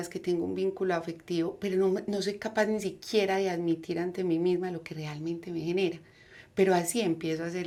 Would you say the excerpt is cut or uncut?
uncut